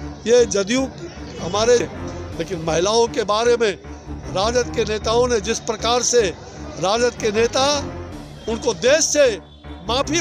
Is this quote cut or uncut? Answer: cut